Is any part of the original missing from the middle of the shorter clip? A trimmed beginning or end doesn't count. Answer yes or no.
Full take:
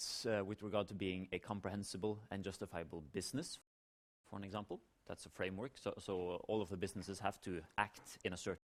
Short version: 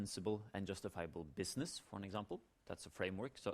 yes